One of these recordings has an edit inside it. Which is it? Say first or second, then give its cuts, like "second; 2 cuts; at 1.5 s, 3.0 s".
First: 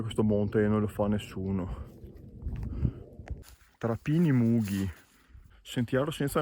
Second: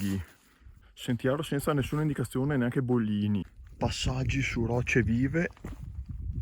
second; 1 cut; at 3.4 s